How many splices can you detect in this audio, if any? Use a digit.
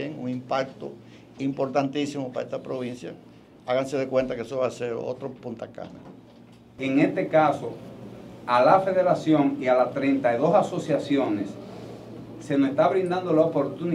1